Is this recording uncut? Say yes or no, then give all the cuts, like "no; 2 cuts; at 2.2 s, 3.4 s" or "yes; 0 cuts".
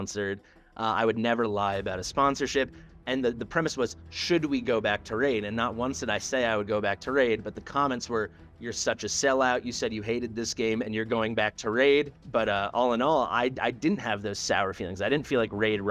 no; 1 cut; at 12.1 s